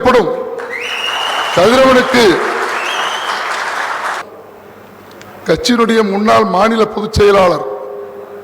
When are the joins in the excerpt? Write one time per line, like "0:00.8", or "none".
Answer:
0:04.2